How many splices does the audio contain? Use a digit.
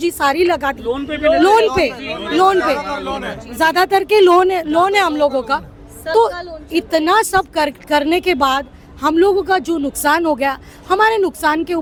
0